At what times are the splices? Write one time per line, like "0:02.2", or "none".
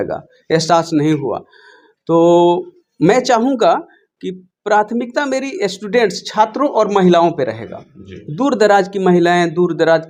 none